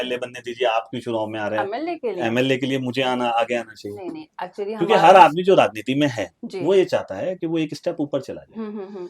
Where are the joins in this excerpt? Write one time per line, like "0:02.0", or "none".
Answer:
none